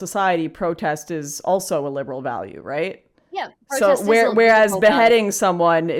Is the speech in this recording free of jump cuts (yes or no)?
yes